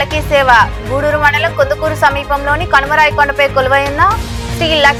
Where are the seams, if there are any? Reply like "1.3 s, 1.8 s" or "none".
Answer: none